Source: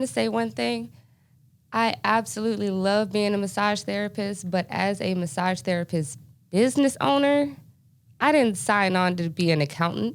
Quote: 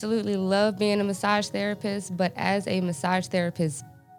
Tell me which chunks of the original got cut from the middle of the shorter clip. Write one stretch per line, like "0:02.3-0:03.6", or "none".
none